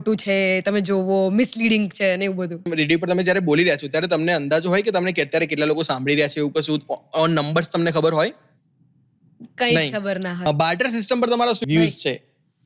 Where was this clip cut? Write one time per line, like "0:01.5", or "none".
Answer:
0:02.7
0:10.5
0:11.6